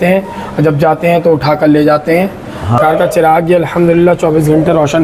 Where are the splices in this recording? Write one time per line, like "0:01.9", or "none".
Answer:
0:02.8